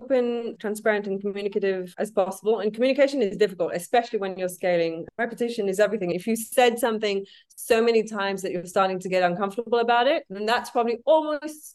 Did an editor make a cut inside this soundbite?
yes; 2 cuts; at 5.0 s, 6.1 s

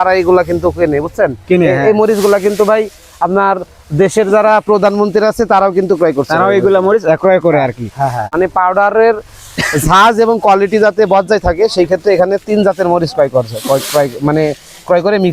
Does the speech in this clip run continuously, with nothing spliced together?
no; 1 cut; at 8.3 s

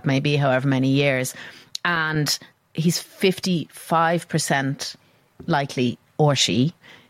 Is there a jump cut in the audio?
yes; 2 cuts; at 2.6 s, 6.0 s

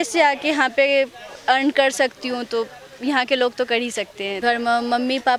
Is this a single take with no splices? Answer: no; 1 cut; at 4.2 s

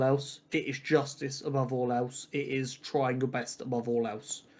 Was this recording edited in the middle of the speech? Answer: no; 0 cuts

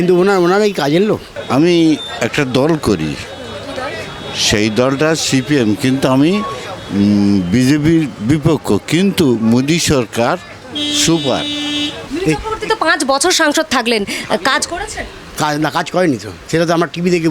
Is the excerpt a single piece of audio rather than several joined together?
no; 2 cuts; at 1.3 s, 12.0 s

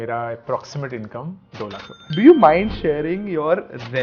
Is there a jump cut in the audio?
yes; 1 cut; at 2.0 s

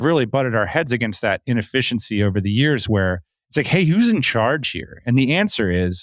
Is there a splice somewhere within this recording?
no; 0 cuts

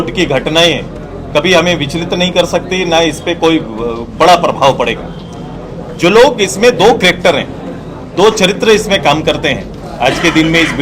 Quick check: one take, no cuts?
yes; 0 cuts

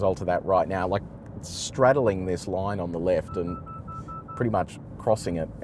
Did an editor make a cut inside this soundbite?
no; 0 cuts

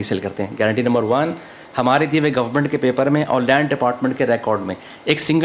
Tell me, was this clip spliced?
no; 0 cuts

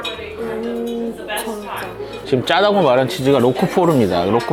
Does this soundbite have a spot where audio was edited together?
no; 0 cuts

